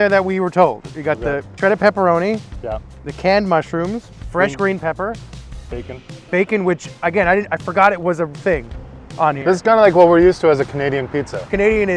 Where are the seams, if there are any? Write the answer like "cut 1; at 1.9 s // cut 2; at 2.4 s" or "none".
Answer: none